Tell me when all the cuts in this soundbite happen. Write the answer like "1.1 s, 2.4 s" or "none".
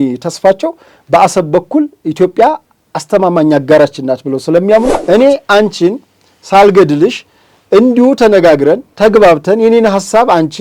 5.0 s